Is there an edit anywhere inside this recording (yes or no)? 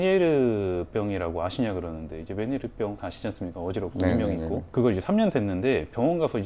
no